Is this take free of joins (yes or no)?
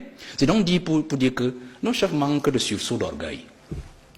yes